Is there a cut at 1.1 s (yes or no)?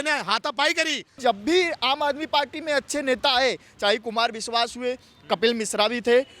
yes